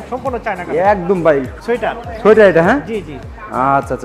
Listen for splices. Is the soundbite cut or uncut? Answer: cut